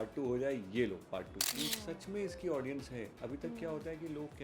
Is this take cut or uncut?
cut